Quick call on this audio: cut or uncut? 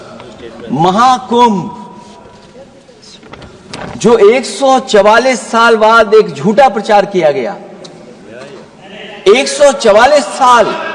uncut